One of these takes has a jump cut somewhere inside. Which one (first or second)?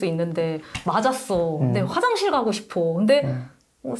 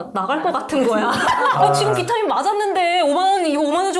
second